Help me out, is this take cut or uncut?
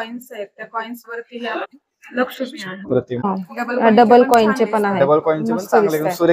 cut